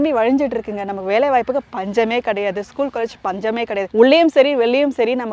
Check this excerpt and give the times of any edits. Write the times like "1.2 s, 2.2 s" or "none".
none